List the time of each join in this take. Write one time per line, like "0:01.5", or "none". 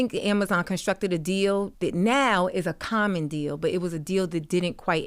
0:01.7